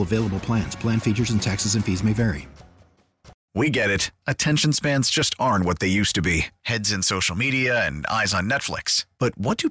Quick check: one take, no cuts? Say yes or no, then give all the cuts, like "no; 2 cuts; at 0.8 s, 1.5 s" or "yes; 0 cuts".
no; 1 cut; at 3.4 s